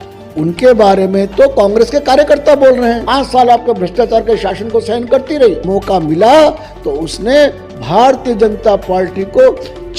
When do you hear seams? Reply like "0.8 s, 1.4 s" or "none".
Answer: 3.0 s, 5.6 s